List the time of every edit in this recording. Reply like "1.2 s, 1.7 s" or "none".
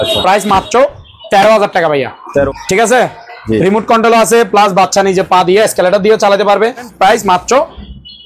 2.5 s, 6.9 s